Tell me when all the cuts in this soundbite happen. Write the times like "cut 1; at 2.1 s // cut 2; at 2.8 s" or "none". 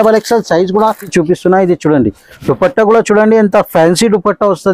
cut 1; at 1.1 s